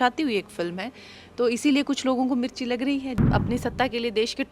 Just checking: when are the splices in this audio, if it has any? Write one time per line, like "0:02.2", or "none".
0:03.2